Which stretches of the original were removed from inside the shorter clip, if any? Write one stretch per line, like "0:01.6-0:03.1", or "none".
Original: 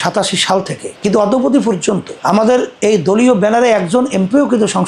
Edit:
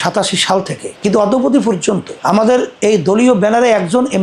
none